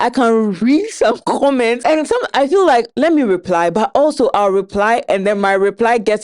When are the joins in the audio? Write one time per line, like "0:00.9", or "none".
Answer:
0:01.8
0:02.9